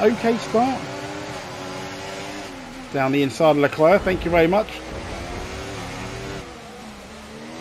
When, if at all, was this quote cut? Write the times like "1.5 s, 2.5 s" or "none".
none